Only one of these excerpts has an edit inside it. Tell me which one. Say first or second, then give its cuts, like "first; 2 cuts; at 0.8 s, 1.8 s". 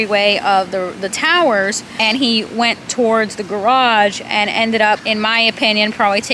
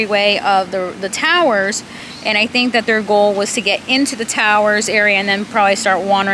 first; 2 cuts; at 1.9 s, 5.0 s